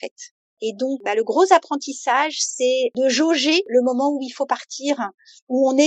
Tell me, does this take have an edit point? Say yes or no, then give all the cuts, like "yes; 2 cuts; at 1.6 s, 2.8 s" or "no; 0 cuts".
yes; 3 cuts; at 1.0 s, 2.9 s, 3.7 s